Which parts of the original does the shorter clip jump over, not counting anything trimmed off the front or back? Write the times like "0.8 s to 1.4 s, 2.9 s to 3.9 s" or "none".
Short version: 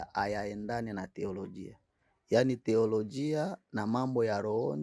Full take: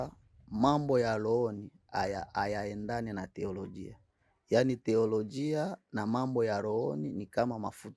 none